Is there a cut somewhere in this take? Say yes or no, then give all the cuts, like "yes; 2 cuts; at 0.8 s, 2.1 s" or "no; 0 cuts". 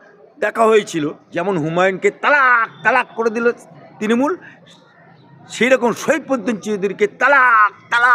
yes; 1 cut; at 1.2 s